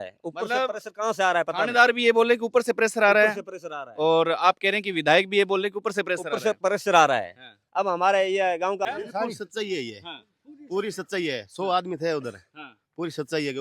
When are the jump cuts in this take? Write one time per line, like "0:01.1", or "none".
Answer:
0:08.8